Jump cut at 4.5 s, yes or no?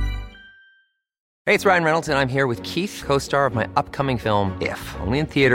no